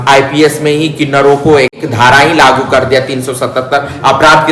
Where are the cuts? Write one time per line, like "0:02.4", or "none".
0:01.8